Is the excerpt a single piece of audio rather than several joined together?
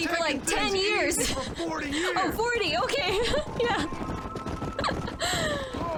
yes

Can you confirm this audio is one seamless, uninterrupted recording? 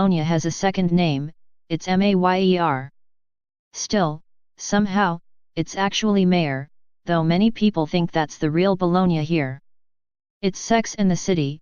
yes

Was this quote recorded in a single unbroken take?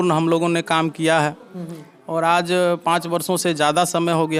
yes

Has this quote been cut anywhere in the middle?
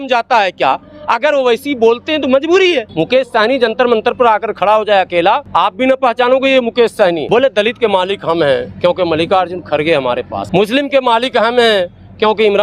yes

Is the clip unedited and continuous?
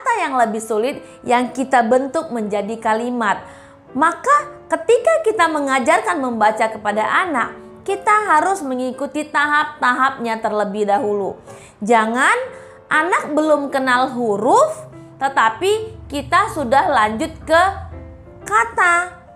yes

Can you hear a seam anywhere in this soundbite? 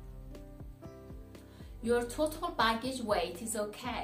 yes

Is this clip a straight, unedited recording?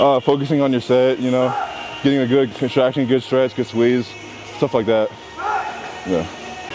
yes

